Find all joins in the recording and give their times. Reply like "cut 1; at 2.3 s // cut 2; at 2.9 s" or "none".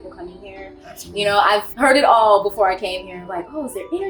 cut 1; at 1.7 s